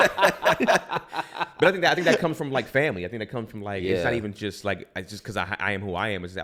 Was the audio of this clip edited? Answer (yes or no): no